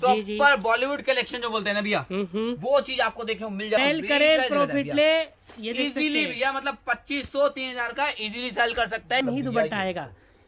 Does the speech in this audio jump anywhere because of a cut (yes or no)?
yes